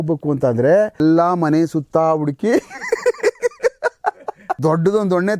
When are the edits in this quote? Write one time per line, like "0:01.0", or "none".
0:01.0
0:04.4

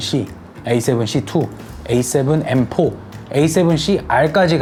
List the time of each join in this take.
none

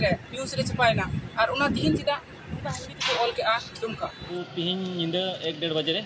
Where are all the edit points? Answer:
0:04.2

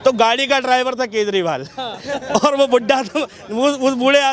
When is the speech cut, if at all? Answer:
none

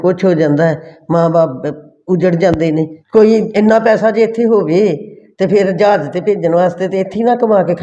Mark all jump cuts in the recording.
0:03.0

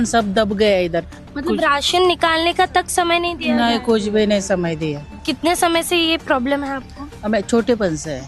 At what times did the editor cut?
0:01.2
0:05.1

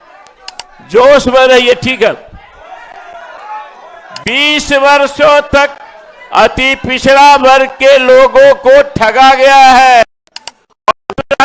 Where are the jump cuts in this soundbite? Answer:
0:10.4

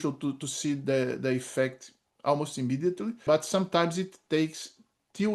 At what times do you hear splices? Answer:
0:03.2

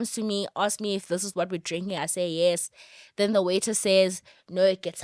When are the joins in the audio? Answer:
none

